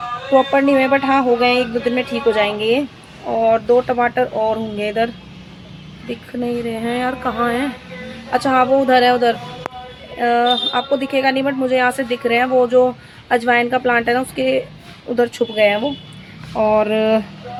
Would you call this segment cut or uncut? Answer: uncut